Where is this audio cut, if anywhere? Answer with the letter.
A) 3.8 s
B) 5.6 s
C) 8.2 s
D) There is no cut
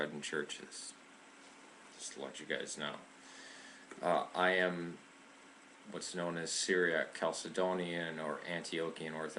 D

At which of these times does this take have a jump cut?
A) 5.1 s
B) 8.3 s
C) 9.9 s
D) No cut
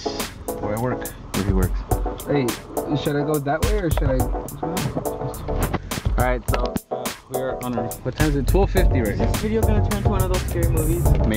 C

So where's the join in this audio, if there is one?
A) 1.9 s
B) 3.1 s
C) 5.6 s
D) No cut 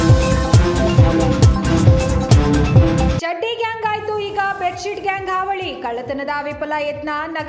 B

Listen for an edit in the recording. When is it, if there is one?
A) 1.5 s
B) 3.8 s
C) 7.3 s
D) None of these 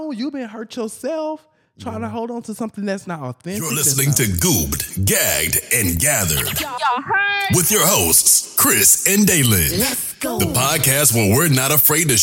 B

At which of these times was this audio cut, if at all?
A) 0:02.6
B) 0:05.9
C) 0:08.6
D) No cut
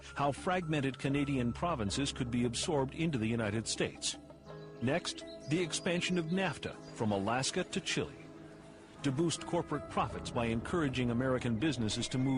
A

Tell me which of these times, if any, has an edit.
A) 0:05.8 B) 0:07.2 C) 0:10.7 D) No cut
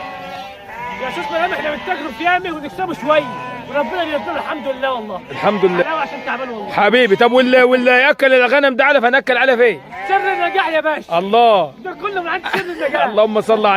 A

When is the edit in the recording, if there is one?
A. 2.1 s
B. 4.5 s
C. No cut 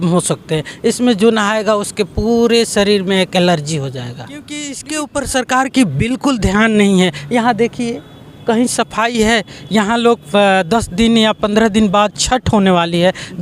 B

